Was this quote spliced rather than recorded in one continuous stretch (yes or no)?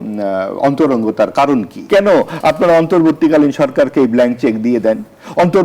yes